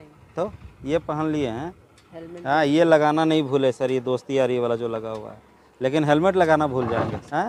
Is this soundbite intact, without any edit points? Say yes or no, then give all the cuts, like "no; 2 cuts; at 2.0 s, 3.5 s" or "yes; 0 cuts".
yes; 0 cuts